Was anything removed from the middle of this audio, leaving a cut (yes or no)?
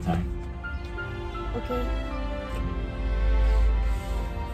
no